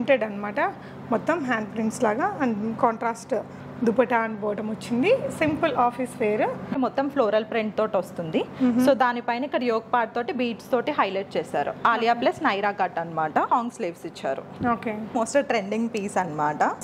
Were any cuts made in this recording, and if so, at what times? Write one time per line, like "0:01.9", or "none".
0:06.7
0:13.5
0:15.1